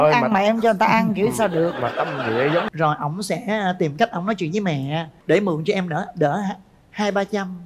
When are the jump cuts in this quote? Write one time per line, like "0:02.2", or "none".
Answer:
0:02.6